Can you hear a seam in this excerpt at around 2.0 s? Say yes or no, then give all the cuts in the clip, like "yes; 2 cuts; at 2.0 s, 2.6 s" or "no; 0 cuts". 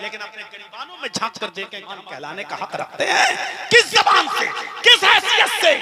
yes; 1 cut; at 2.0 s